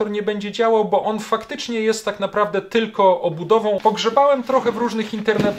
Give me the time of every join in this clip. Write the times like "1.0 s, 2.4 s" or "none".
3.8 s